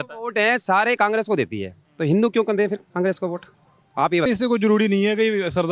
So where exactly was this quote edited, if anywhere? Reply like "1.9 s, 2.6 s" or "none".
4.3 s